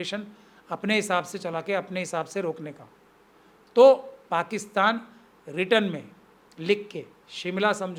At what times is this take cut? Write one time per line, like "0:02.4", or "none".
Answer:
none